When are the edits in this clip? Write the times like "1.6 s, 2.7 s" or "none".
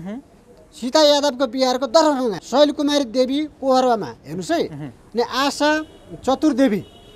2.4 s